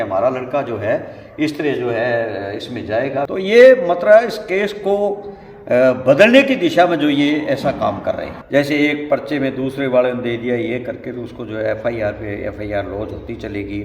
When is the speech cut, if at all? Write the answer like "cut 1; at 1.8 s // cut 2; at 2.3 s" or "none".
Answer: cut 1; at 3.3 s // cut 2; at 8.3 s